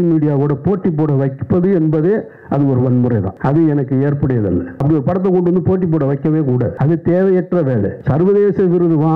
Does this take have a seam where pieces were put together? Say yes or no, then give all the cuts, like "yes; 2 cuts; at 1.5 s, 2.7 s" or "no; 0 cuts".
yes; 4 cuts; at 3.3 s, 4.7 s, 6.7 s, 8.0 s